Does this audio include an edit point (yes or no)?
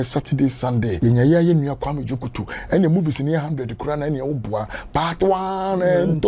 yes